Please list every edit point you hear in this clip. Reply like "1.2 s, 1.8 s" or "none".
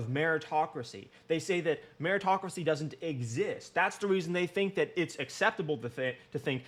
none